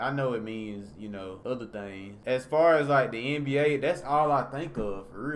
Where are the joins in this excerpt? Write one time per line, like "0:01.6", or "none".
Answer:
0:01.4
0:02.1